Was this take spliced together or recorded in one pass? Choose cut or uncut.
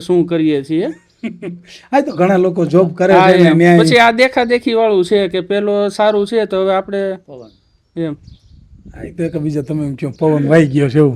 uncut